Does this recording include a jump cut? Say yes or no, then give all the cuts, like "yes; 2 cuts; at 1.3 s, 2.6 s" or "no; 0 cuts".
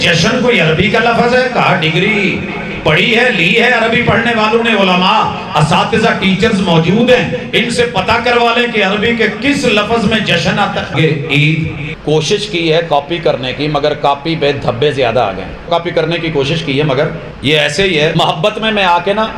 yes; 5 cuts; at 11.0 s, 11.9 s, 15.7 s, 17.3 s, 18.1 s